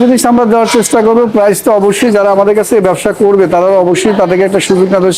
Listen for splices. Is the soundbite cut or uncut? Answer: uncut